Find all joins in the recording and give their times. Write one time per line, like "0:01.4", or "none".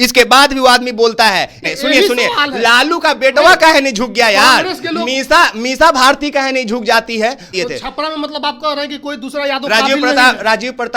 0:01.7
0:07.5